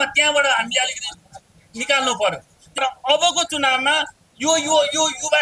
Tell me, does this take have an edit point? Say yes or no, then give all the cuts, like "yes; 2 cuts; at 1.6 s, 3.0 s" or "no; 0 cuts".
yes; 1 cut; at 2.8 s